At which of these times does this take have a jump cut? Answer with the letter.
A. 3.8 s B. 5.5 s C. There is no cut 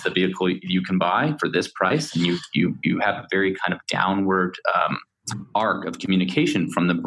C